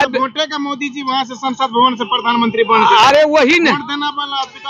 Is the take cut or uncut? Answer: uncut